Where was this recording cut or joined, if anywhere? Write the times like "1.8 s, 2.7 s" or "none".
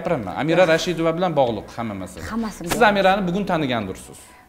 none